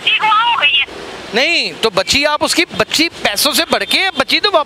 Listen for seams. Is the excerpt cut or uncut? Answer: uncut